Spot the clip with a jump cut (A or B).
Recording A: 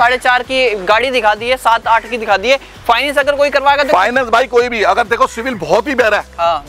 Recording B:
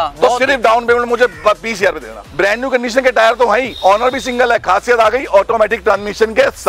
B